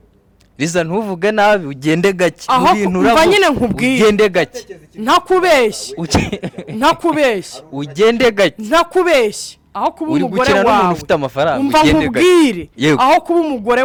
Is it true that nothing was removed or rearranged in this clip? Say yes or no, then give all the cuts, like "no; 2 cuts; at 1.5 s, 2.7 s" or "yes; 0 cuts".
yes; 0 cuts